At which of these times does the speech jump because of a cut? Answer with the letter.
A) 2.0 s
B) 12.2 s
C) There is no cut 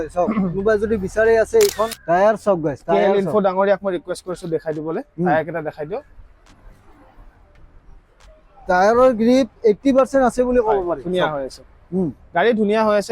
A